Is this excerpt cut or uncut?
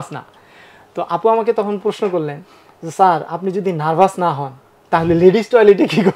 uncut